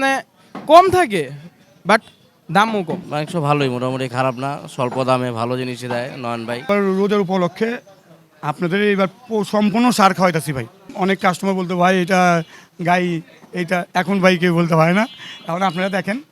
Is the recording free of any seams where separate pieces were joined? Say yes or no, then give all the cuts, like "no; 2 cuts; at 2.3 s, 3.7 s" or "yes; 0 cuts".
no; 2 cuts; at 3.0 s, 6.7 s